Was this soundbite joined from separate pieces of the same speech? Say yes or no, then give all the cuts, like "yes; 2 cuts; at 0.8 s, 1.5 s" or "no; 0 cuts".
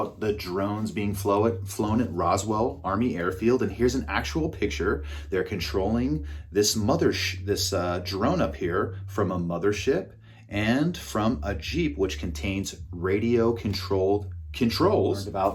no; 0 cuts